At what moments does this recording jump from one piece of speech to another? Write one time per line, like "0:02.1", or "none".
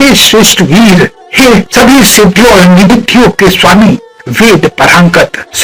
none